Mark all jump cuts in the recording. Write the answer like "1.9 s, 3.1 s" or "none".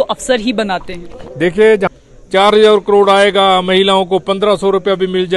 1.9 s